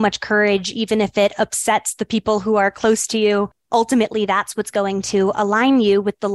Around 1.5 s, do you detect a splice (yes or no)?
no